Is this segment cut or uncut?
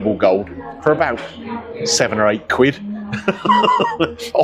uncut